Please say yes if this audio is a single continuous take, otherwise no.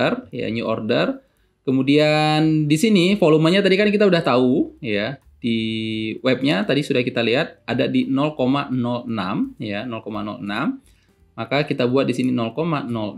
yes